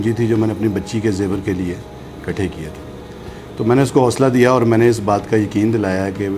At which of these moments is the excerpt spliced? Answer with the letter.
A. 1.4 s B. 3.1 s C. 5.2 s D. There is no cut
D